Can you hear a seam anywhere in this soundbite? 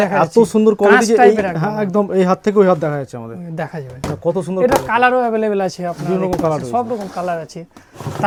no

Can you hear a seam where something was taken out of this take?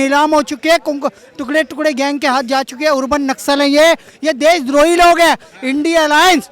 no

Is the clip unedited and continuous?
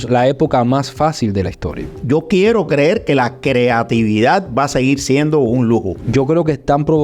no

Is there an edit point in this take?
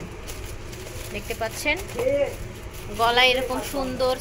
no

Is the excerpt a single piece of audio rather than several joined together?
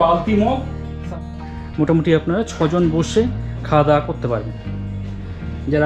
no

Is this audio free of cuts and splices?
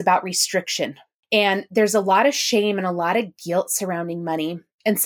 no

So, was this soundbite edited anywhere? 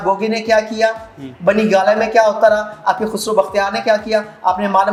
no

